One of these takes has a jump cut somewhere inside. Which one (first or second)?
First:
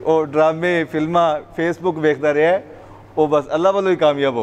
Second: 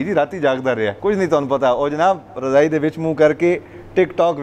second